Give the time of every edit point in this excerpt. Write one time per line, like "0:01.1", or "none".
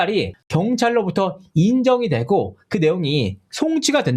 none